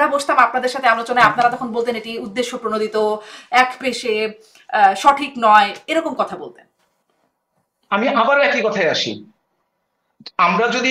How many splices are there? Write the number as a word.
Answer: zero